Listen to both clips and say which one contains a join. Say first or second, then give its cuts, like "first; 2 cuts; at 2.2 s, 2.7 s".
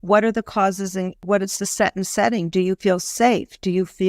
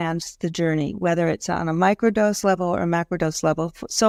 first; 1 cut; at 1.2 s